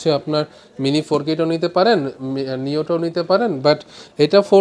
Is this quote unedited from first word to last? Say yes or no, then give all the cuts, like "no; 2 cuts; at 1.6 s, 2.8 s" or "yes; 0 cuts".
yes; 0 cuts